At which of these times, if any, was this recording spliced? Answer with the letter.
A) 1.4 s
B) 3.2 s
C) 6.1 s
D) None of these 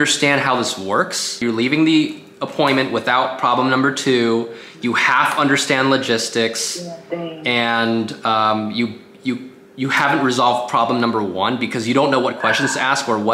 A